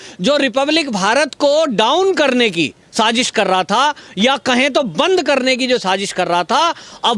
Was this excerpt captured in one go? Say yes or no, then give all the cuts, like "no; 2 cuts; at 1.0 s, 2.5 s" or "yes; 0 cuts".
yes; 0 cuts